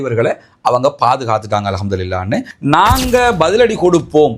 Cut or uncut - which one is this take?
cut